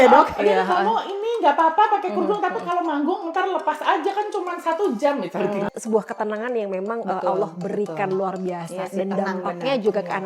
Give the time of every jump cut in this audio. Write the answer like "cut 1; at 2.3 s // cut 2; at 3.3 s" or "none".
cut 1; at 5.7 s